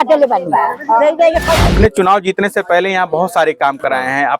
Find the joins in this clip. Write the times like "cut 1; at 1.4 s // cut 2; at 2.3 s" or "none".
cut 1; at 1.6 s